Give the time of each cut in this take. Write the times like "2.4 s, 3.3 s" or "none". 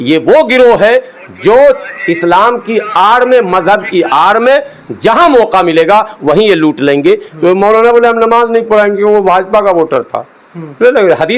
7.3 s